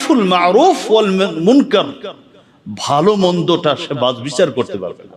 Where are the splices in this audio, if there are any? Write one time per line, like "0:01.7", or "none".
none